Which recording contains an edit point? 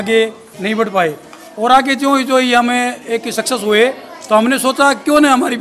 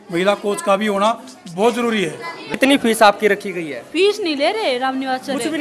second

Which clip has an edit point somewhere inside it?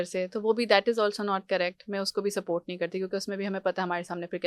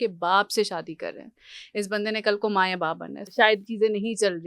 second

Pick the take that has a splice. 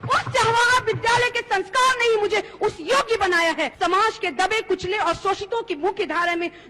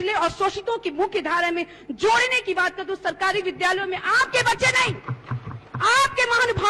first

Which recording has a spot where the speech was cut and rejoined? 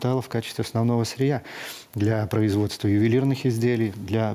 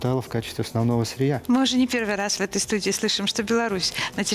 second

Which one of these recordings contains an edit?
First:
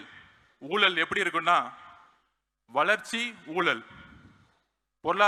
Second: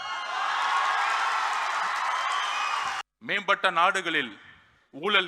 second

